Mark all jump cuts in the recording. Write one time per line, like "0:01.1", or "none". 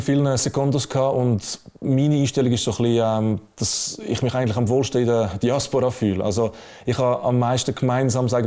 none